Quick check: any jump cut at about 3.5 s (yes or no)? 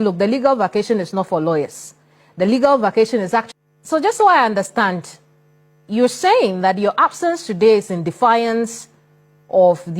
yes